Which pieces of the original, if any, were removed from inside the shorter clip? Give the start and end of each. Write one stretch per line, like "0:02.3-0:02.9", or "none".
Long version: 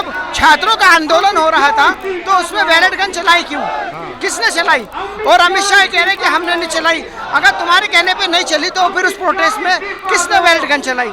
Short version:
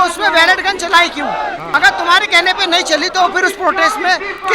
0:04.0-0:07.3